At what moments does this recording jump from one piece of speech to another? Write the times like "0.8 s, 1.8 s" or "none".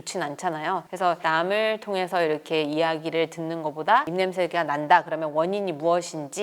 0.9 s, 4.1 s